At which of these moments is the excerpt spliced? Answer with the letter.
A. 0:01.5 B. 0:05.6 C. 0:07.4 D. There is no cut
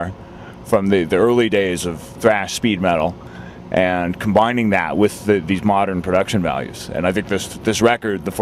D